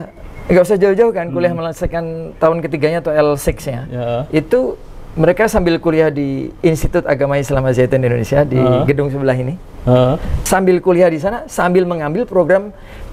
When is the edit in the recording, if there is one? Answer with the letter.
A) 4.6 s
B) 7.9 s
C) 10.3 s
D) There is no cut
C